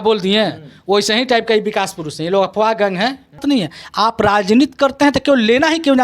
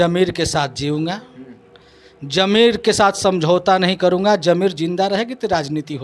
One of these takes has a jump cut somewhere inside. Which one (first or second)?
first